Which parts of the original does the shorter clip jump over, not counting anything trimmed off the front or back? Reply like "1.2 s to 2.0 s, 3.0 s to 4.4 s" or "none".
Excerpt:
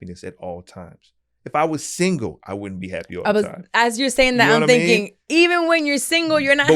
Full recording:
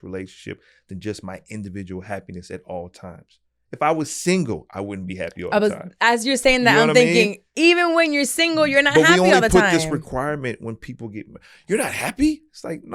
none